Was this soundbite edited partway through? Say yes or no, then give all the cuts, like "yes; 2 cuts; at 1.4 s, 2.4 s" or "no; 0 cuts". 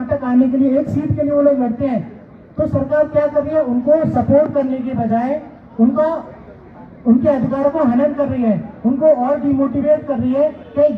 no; 0 cuts